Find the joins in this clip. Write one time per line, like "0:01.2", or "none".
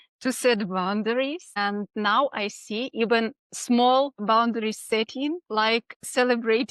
0:01.8
0:03.5
0:04.2
0:05.4

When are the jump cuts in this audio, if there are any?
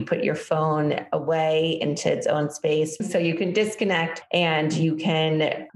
0:03.0

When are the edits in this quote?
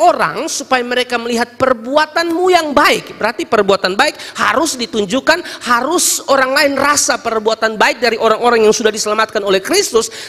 none

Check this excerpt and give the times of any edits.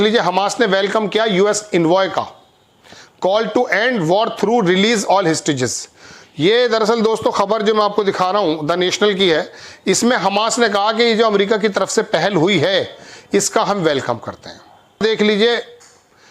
0:15.0

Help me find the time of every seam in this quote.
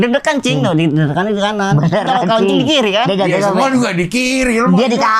none

